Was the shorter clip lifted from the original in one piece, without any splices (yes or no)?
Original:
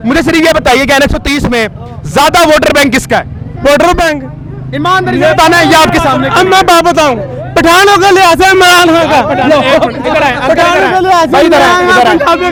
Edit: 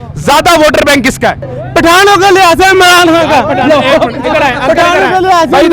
no